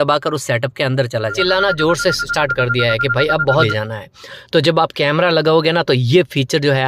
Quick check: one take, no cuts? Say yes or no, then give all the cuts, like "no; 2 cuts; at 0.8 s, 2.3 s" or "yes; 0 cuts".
no; 2 cuts; at 1.3 s, 3.5 s